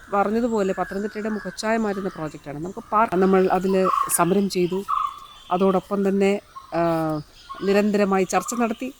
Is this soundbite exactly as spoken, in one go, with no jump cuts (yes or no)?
no